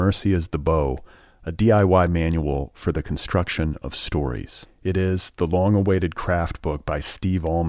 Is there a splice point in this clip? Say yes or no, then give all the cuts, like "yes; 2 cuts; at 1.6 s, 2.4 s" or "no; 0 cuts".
no; 0 cuts